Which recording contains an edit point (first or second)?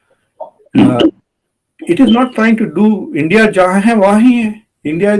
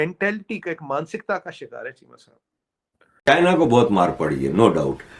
second